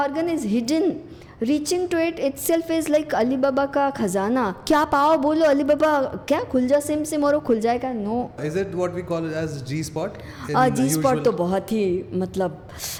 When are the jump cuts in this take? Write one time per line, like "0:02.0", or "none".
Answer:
none